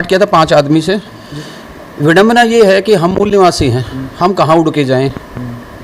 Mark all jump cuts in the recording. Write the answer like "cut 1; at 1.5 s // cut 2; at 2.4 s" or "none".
cut 1; at 1.2 s